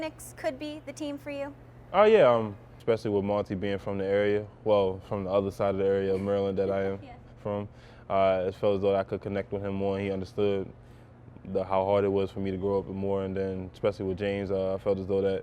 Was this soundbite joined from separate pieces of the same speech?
yes; 1 cut; at 2.7 s

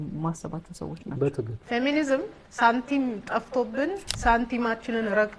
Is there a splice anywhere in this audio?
yes; 3 cuts; at 1.5 s, 2.4 s, 4.1 s

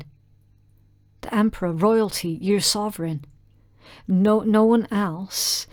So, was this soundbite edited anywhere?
no; 0 cuts

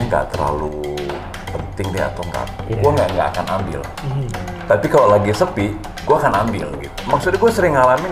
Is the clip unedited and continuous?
no; 1 cut; at 6.9 s

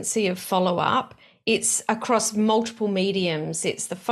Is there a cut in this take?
no; 0 cuts

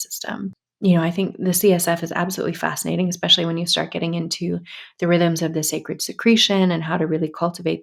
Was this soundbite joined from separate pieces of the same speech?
no; 0 cuts

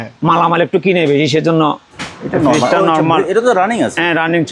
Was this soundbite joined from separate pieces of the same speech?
yes; 1 cut; at 1.9 s

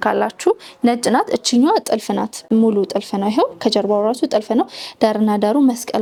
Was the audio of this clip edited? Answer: no; 0 cuts

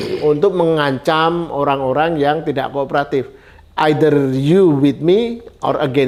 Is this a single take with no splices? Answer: yes; 0 cuts

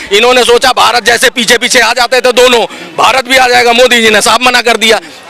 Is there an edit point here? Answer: no; 0 cuts

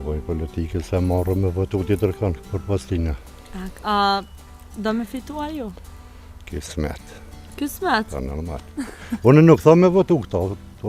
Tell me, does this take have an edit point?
no; 0 cuts

